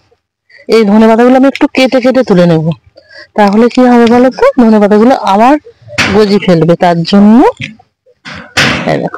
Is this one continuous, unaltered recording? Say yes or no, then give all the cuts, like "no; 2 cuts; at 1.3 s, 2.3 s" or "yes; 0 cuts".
yes; 0 cuts